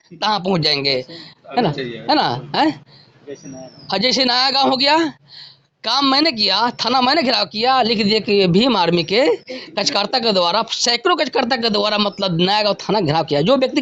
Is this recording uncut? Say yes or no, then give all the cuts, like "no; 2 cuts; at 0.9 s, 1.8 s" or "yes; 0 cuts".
yes; 0 cuts